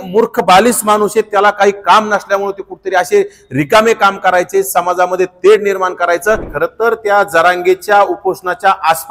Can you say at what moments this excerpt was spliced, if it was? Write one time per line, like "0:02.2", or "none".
0:06.5